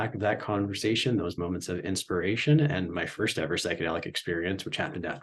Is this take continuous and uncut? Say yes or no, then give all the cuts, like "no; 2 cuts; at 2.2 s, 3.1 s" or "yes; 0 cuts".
yes; 0 cuts